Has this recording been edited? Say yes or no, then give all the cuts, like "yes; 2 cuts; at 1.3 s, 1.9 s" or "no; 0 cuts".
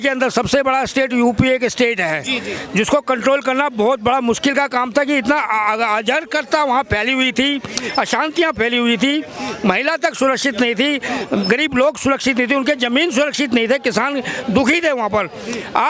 no; 0 cuts